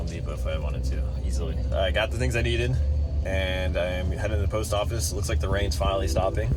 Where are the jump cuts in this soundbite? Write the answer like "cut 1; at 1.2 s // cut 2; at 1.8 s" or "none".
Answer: none